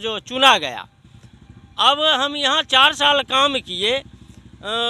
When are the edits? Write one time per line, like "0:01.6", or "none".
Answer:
none